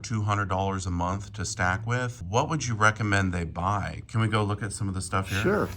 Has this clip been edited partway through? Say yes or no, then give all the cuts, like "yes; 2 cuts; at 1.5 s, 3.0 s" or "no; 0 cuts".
yes; 1 cut; at 2.2 s